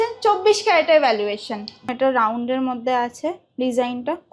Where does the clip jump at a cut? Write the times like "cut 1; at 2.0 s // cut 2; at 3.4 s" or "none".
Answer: cut 1; at 1.9 s